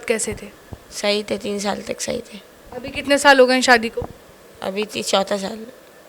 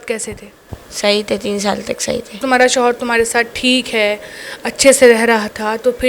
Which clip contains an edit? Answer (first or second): second